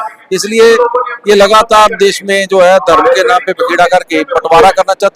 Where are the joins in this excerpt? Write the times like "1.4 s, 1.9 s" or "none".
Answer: none